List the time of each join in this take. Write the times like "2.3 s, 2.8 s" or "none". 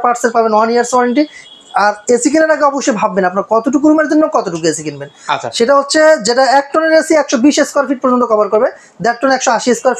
none